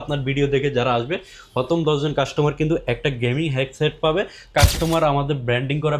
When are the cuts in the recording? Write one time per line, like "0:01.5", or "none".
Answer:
0:04.5